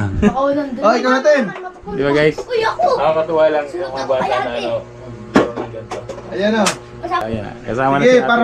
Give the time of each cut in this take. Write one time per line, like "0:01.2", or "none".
0:07.2